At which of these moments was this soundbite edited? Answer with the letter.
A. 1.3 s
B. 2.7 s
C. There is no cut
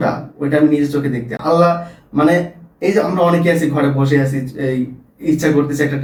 C